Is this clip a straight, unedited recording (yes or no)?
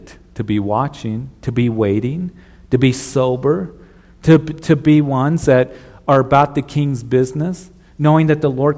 yes